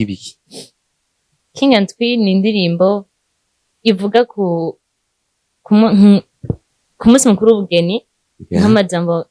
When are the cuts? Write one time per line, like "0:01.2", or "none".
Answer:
none